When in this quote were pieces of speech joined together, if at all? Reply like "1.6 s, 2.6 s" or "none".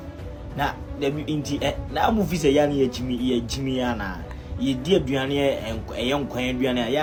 none